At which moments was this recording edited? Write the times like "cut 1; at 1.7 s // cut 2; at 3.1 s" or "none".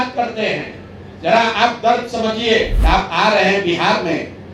cut 1; at 2.8 s